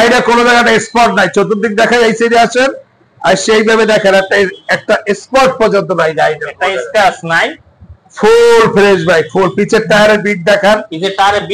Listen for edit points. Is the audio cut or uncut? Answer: uncut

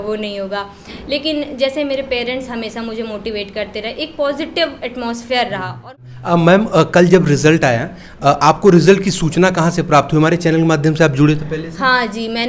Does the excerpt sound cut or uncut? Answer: cut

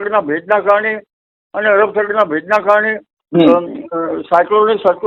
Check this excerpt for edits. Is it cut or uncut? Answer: uncut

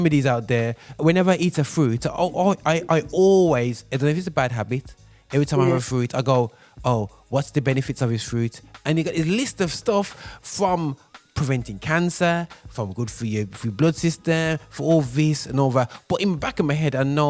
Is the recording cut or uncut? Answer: cut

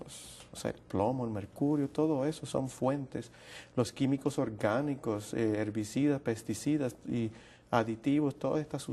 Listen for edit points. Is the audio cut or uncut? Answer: uncut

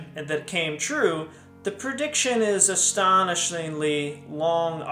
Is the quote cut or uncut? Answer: uncut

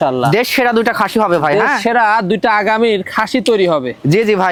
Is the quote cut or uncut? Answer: uncut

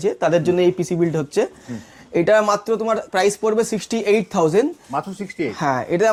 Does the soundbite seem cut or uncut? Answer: uncut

